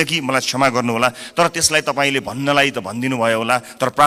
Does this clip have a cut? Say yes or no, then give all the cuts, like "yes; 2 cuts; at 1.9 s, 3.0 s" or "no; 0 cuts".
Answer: no; 0 cuts